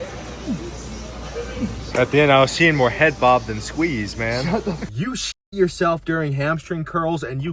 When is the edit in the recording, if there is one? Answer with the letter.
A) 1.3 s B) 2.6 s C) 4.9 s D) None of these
C